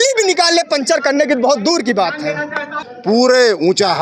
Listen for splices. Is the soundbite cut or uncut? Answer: cut